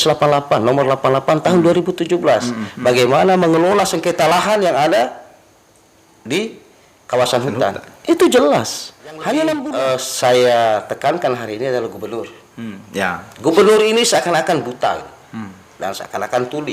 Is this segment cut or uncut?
cut